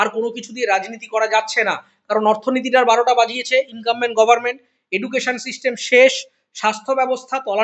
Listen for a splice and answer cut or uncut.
uncut